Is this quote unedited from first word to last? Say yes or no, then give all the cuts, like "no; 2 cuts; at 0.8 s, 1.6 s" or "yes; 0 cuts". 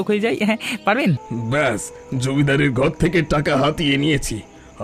no; 1 cut; at 1.3 s